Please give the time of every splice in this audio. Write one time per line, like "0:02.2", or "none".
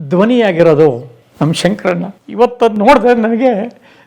0:02.2